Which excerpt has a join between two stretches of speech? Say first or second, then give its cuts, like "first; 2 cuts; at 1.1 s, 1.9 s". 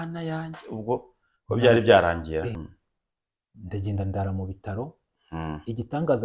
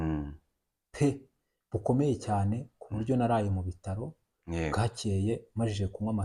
first; 1 cut; at 2.7 s